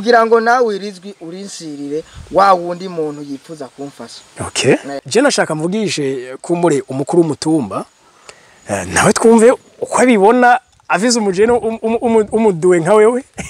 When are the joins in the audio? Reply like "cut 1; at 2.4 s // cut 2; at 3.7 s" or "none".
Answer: cut 1; at 5.0 s

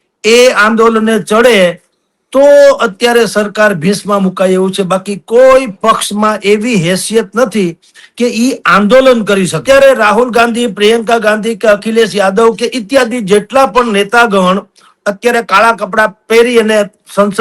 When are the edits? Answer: cut 1; at 9.6 s

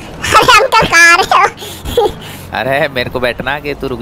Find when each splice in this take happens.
none

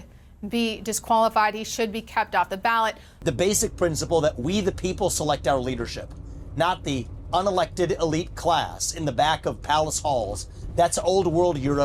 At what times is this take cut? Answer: cut 1; at 3.1 s

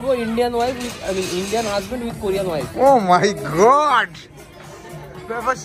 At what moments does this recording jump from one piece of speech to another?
none

